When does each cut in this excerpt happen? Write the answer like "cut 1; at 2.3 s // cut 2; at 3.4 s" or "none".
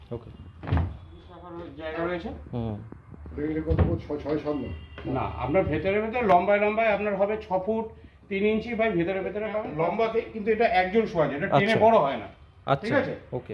cut 1; at 1.4 s // cut 2; at 9.7 s